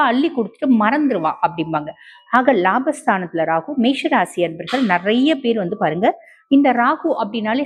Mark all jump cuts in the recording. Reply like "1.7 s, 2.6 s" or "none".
none